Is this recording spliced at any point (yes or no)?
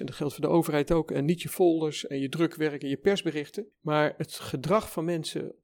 no